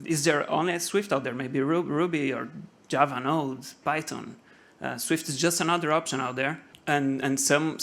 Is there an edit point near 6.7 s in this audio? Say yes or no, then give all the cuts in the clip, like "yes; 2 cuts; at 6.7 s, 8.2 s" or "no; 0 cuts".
yes; 1 cut; at 6.7 s